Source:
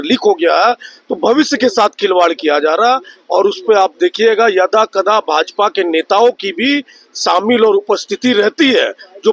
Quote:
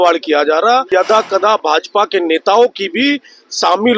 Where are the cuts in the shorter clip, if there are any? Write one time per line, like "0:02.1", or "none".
0:00.9